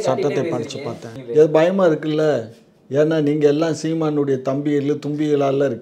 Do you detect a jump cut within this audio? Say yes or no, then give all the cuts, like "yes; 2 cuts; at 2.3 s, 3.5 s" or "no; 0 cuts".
yes; 1 cut; at 1.1 s